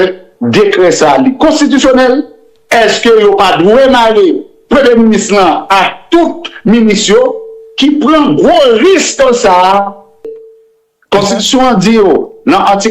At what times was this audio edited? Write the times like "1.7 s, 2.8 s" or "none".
10.3 s